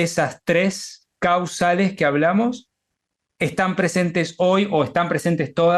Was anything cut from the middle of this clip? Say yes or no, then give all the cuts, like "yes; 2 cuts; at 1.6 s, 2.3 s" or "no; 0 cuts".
no; 0 cuts